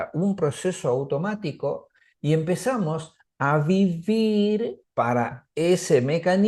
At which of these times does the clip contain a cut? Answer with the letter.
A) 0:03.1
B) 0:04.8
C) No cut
B